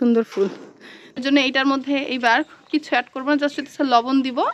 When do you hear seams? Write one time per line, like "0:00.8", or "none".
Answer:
0:01.2